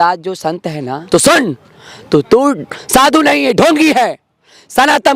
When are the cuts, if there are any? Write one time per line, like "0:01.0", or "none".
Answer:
0:01.0